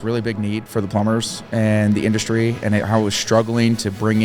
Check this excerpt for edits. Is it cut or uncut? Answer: uncut